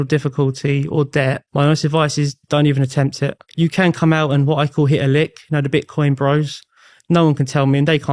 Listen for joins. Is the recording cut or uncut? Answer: cut